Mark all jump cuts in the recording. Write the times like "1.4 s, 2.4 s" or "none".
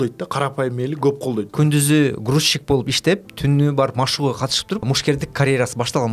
1.5 s, 4.8 s